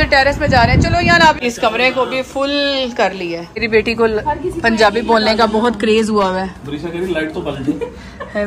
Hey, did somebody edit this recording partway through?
yes; 2 cuts; at 1.4 s, 3.5 s

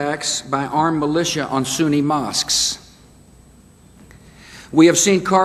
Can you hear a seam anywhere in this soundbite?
yes; 1 cut; at 1.5 s

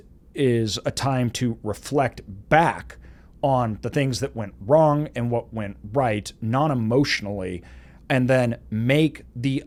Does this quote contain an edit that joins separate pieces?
no; 0 cuts

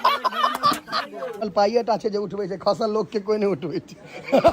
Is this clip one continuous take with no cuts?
no; 1 cut; at 1.4 s

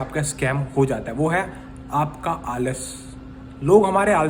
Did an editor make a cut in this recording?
no; 0 cuts

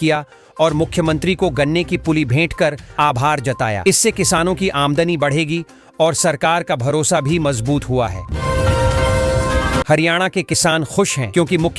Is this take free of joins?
no; 2 cuts; at 8.2 s, 9.8 s

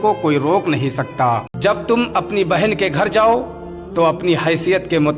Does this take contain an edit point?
yes; 1 cut; at 1.5 s

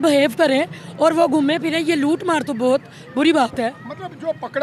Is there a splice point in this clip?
no; 0 cuts

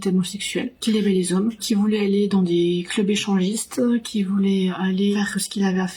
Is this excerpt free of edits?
yes; 0 cuts

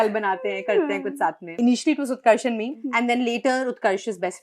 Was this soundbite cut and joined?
yes; 2 cuts; at 1.6 s, 2.8 s

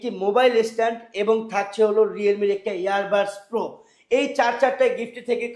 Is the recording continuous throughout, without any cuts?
yes; 0 cuts

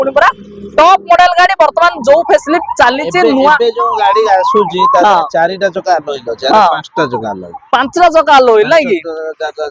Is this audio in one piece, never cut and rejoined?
yes; 0 cuts

